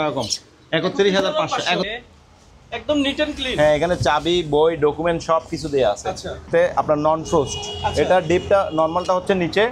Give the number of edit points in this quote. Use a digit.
2